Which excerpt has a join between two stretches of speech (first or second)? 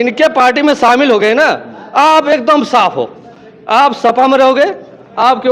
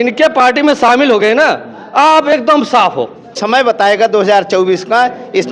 second